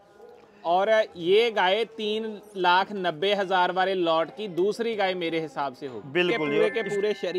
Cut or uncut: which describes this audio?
cut